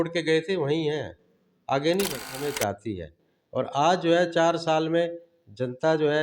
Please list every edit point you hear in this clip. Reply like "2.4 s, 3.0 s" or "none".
2.5 s